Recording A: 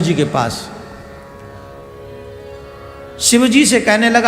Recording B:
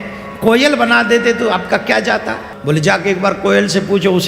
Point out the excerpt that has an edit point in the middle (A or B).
B